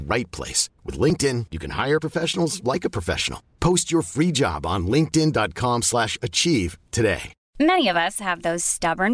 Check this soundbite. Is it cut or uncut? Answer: cut